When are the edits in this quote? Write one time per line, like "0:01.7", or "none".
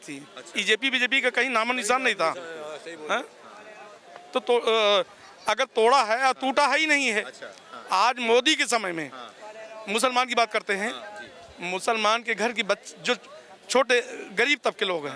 none